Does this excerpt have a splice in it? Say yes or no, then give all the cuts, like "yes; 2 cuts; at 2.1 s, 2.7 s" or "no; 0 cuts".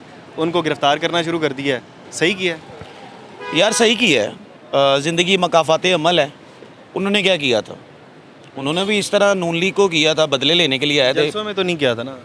no; 0 cuts